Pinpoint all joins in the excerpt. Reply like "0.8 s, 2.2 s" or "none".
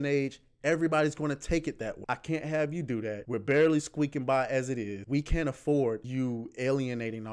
2.0 s, 3.2 s, 5.0 s, 6.1 s

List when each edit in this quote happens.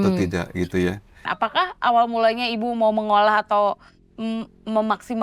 1.3 s

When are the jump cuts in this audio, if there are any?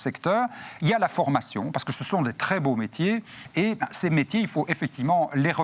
3.4 s

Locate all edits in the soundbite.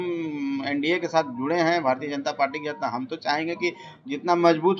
none

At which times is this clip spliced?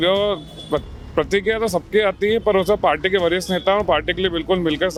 none

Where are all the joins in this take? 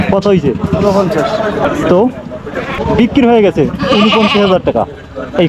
none

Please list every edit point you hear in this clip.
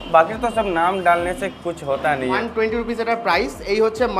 2.4 s

